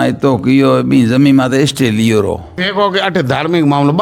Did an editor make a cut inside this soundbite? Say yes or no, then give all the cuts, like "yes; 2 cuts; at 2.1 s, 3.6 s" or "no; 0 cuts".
yes; 1 cut; at 2.5 s